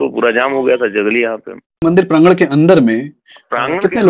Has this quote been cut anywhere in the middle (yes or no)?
yes